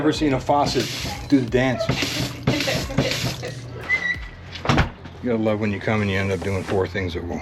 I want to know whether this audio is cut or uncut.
cut